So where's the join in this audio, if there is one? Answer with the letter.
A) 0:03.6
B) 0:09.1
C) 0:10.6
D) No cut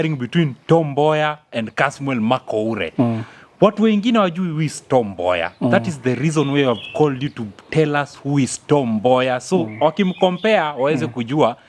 D